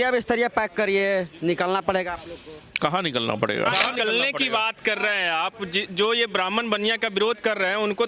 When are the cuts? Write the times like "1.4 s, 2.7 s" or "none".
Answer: 3.7 s

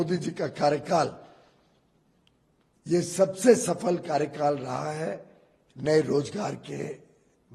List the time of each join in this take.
none

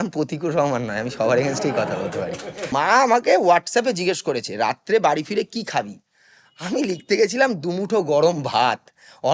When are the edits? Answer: 2.7 s

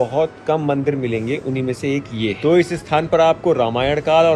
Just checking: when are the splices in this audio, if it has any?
none

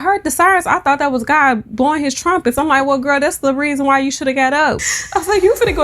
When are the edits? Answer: 4.9 s

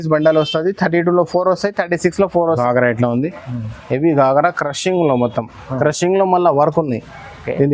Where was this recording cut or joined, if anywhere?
2.6 s

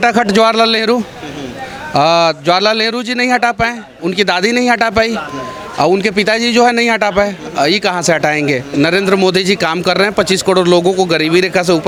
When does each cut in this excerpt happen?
none

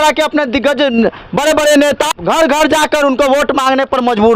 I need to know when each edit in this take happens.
2.2 s

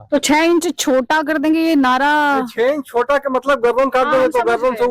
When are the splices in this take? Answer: none

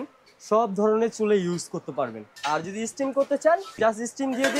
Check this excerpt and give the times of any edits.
2.3 s, 3.7 s

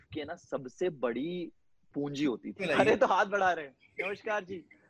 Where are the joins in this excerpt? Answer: 2.6 s

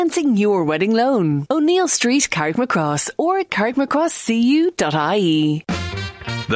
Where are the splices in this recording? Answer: 5.6 s

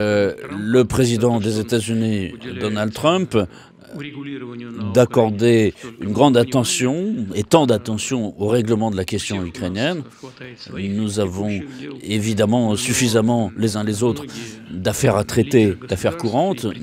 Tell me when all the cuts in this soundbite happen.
none

